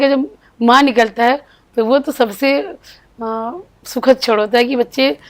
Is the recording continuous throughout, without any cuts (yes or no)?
yes